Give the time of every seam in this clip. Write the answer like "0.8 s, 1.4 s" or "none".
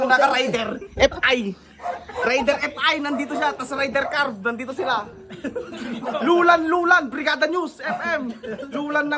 none